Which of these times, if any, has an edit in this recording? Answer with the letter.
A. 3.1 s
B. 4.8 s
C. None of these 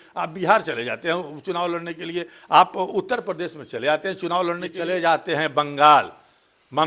B